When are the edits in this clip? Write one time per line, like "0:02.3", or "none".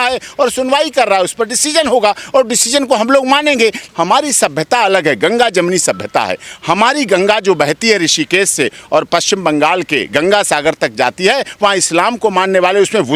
0:03.8